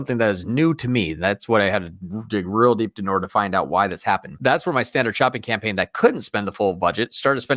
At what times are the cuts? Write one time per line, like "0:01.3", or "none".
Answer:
0:04.3